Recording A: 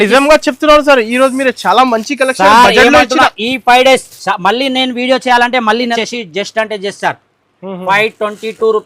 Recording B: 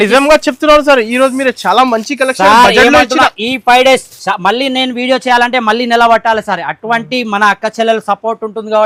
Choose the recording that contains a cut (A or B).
A